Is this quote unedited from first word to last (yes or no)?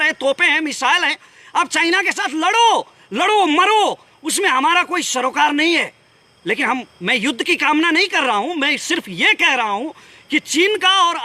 yes